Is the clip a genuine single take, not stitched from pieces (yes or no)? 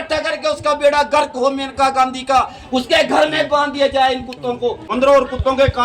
no